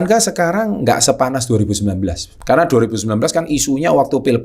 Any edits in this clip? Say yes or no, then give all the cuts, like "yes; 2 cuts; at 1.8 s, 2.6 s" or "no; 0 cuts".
yes; 1 cut; at 2.3 s